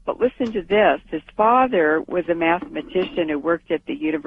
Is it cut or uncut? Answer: uncut